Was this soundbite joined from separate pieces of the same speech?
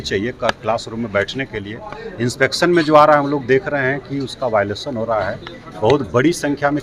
no; 0 cuts

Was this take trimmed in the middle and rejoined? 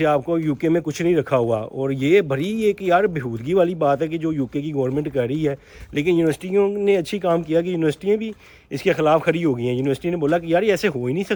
no; 0 cuts

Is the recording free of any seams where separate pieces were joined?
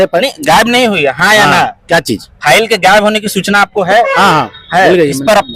yes; 0 cuts

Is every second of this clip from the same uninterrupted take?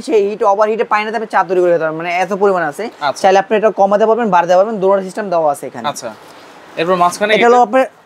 yes; 0 cuts

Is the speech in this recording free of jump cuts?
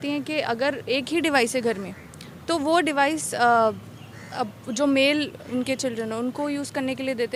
yes; 0 cuts

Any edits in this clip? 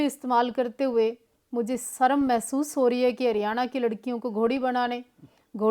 no; 0 cuts

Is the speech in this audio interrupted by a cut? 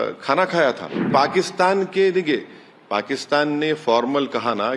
yes; 1 cut; at 1.1 s

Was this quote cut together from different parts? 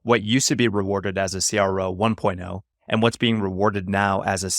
no; 0 cuts

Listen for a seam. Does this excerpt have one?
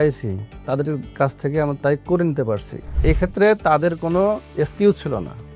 yes; 2 cuts; at 1.1 s, 4.5 s

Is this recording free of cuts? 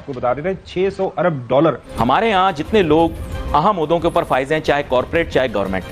no; 1 cut; at 1.9 s

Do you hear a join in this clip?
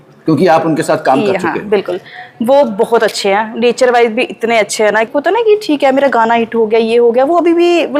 yes; 1 cut; at 5.1 s

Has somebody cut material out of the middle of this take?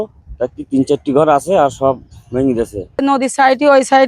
yes; 1 cut; at 3.0 s

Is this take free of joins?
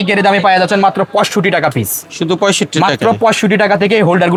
yes; 0 cuts

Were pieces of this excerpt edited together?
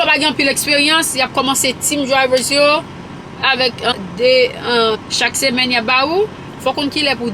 yes; 3 cuts; at 3.9 s, 5.0 s, 6.5 s

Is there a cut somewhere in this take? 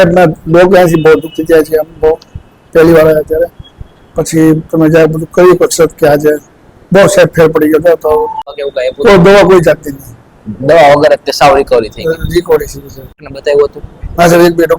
yes; 2 cuts; at 8.5 s, 13.3 s

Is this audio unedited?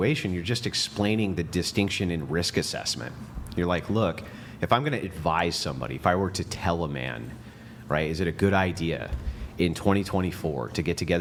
yes; 0 cuts

